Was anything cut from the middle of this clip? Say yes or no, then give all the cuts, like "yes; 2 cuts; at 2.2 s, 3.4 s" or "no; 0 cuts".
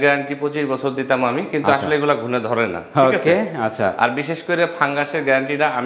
no; 0 cuts